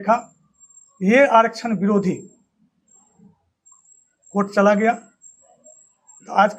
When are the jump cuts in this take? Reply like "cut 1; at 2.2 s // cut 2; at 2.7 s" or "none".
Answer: none